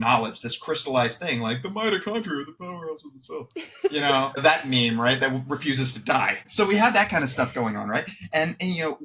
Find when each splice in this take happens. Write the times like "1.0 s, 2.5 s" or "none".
4.4 s, 6.4 s